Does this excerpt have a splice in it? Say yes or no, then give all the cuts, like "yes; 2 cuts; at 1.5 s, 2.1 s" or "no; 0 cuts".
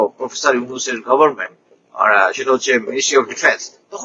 no; 0 cuts